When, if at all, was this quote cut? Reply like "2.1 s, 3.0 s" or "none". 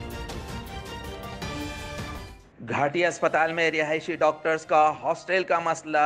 2.4 s